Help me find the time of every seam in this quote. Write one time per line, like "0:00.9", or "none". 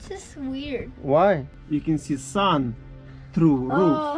0:01.5